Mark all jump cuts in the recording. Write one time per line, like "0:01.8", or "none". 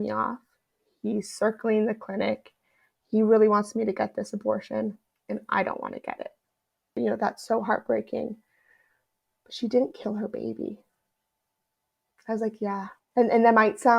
0:07.0